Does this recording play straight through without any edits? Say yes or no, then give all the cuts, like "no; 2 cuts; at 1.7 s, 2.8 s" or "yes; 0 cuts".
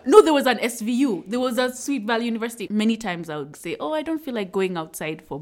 no; 2 cuts; at 2.7 s, 3.5 s